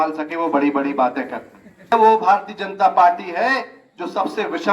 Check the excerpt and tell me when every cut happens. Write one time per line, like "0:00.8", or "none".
0:01.9

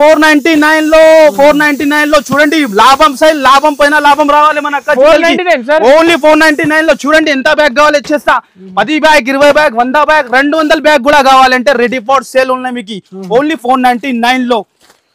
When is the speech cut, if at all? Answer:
none

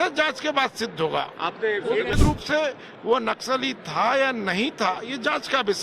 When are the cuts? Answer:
0:02.1

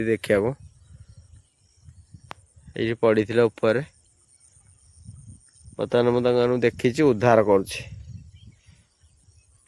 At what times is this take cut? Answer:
none

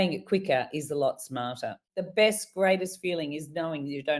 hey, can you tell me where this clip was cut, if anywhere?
0:01.8

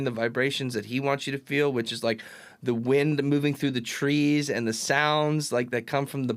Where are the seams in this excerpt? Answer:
none

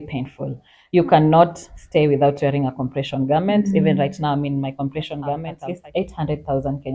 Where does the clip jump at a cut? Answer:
0:05.5

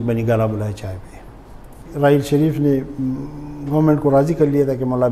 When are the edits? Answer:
0:01.8

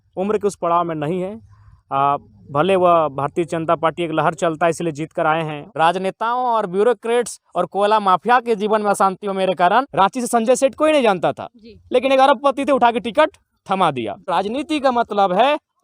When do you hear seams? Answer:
0:05.6
0:09.9
0:14.3

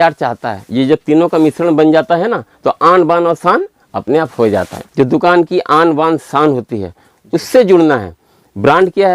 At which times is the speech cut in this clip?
0:04.8

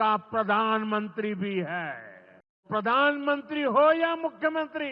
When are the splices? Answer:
0:02.6

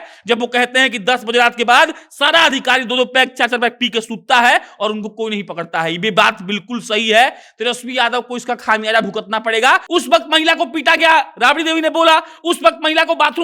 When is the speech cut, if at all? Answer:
0:09.8

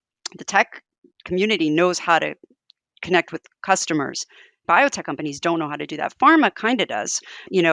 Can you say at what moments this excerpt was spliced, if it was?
0:04.6

